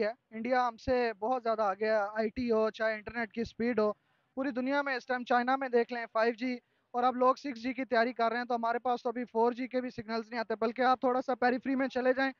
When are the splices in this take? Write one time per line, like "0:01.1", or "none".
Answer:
none